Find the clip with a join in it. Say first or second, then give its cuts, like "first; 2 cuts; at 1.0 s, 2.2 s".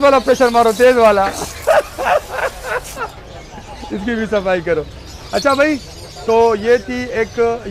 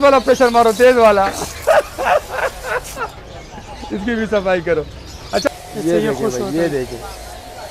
second; 1 cut; at 5.5 s